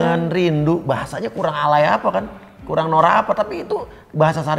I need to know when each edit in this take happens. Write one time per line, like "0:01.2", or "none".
none